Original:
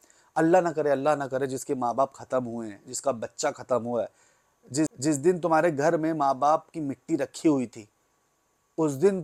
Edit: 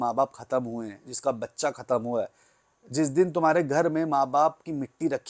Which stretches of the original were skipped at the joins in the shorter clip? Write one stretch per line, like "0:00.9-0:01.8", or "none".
0:04.8-0:05.0